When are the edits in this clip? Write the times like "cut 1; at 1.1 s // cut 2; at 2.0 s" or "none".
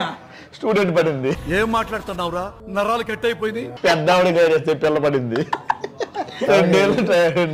cut 1; at 1.4 s // cut 2; at 6.4 s